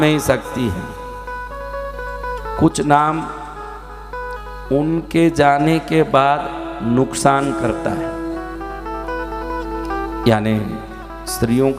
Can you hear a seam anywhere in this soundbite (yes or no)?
no